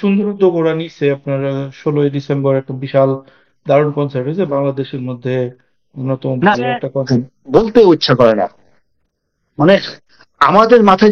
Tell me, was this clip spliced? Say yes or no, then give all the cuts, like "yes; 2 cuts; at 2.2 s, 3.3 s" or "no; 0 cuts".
yes; 1 cut; at 7.1 s